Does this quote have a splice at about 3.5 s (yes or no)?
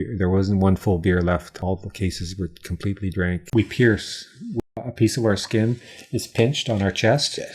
yes